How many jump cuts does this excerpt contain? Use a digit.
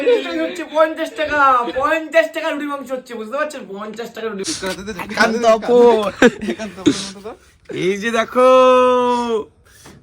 1